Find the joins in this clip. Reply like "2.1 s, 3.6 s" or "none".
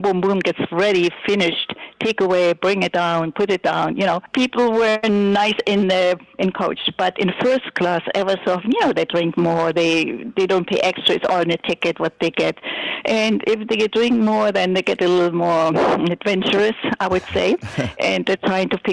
4.3 s

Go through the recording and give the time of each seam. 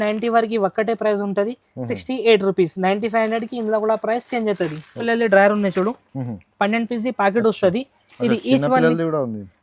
5.0 s

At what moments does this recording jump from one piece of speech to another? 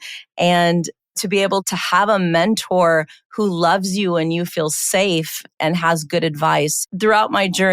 6.7 s

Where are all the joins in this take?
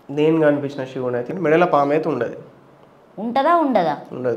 1.3 s

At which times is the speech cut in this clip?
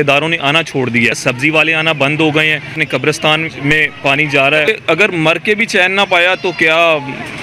1.2 s, 2.8 s, 4.7 s

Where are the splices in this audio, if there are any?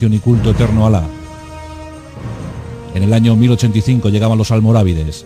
3.6 s

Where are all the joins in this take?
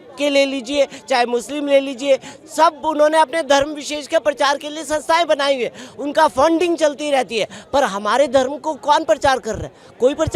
none

